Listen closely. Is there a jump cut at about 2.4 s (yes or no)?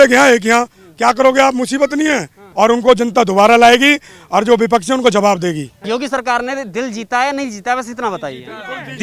yes